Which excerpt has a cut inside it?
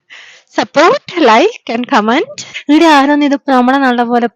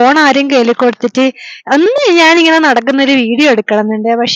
first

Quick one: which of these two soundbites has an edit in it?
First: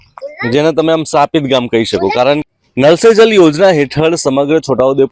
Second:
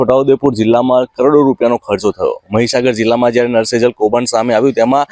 first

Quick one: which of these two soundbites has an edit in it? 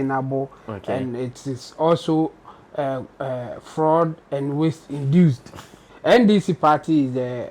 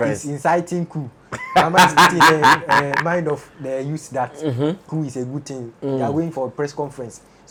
first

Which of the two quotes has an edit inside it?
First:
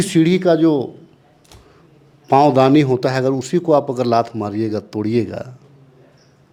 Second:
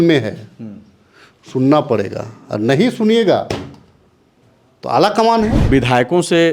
second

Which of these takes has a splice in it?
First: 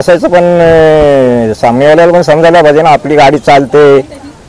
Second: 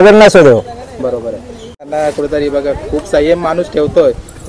second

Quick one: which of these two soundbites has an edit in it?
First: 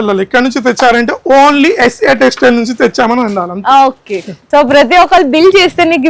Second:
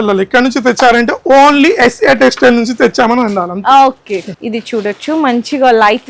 first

